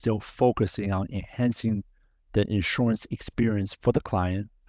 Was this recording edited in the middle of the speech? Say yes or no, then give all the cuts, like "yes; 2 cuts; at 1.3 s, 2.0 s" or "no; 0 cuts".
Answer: no; 0 cuts